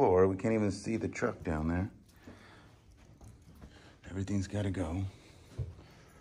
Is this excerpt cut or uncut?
uncut